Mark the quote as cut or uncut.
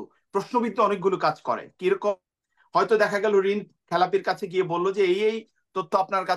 uncut